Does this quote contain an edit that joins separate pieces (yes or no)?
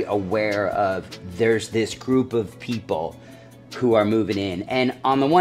no